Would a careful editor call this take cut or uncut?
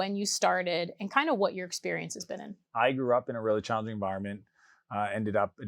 cut